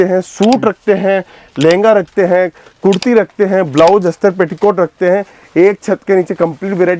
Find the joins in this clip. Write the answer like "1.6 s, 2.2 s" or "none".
none